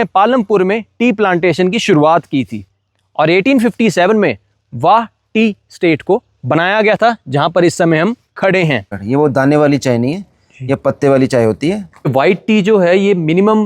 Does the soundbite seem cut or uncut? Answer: cut